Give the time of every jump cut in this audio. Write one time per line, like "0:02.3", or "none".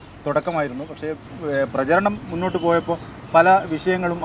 none

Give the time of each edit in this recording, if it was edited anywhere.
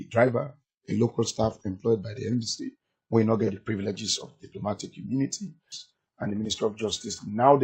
0:05.8

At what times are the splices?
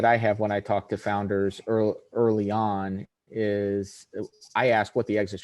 none

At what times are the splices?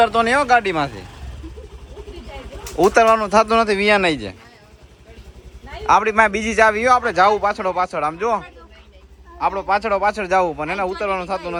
none

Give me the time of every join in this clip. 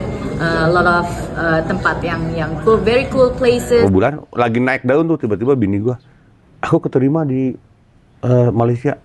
0:03.8

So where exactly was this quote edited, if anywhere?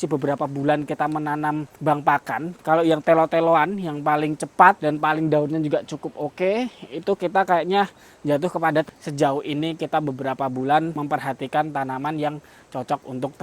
0:02.6
0:08.9

